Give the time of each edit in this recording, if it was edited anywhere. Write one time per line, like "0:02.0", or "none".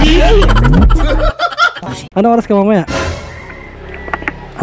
0:02.1